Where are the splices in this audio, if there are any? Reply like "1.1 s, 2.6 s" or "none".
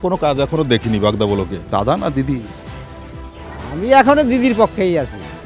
1.6 s